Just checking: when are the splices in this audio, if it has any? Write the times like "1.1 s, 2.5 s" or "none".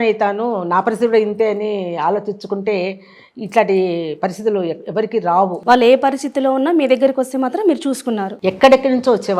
5.6 s, 8.3 s